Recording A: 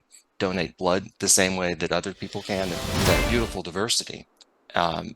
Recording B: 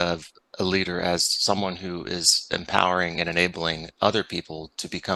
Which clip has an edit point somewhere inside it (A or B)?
A